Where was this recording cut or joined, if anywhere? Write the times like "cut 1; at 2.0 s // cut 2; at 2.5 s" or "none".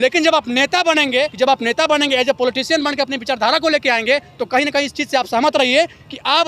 cut 1; at 1.3 s

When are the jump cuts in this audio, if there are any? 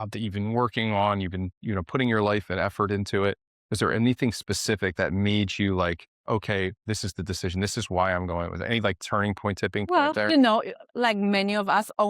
cut 1; at 6.8 s // cut 2; at 10.1 s

